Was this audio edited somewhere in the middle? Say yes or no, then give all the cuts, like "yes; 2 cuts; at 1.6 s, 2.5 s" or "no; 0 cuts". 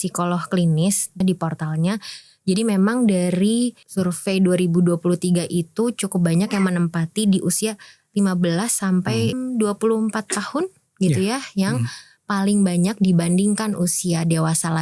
yes; 3 cuts; at 1.2 s, 3.8 s, 9.4 s